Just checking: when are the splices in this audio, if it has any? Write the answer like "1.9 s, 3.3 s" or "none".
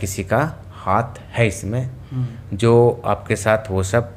none